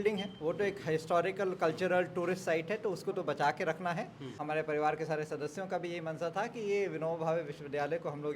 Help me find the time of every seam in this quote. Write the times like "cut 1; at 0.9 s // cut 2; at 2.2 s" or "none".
cut 1; at 4.3 s

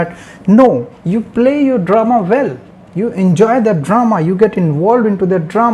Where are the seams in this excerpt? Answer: cut 1; at 0.9 s

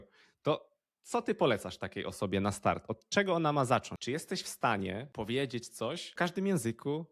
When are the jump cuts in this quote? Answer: cut 1; at 3.9 s // cut 2; at 5.1 s // cut 3; at 6.1 s

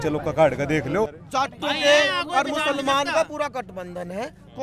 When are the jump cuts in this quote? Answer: cut 1; at 1.2 s

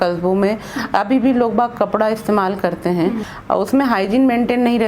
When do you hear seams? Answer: cut 1; at 3.3 s

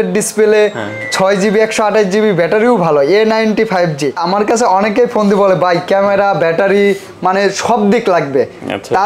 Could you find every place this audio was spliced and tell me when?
cut 1; at 4.2 s

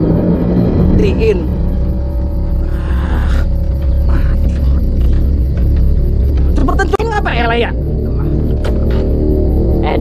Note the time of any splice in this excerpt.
cut 1; at 6.8 s

